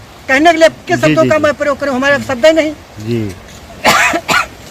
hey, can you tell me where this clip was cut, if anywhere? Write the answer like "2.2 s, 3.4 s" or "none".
none